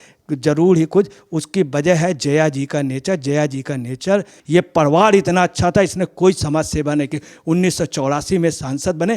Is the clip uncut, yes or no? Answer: no